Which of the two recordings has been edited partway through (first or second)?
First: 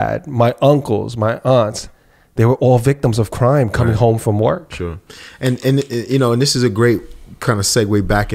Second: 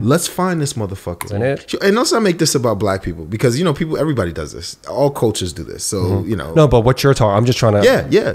second